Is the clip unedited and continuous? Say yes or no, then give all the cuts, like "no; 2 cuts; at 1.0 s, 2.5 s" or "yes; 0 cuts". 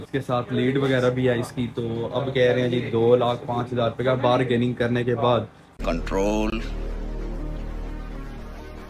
yes; 0 cuts